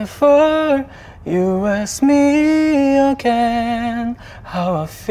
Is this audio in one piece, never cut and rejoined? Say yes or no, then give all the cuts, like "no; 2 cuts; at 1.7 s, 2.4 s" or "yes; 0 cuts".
yes; 0 cuts